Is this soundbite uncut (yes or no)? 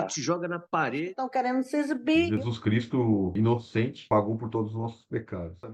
yes